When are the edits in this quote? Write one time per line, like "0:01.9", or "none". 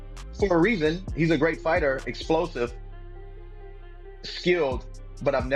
none